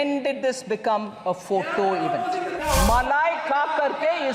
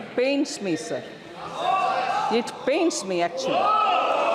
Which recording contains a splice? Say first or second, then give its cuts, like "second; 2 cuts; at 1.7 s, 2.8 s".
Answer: first; 1 cut; at 2.6 s